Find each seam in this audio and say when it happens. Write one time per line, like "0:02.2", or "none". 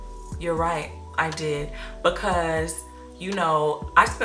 none